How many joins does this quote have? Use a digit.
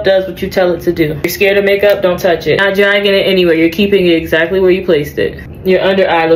3